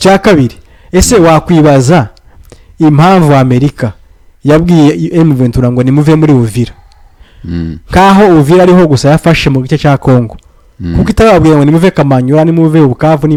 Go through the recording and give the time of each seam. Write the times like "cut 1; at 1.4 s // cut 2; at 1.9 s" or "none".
none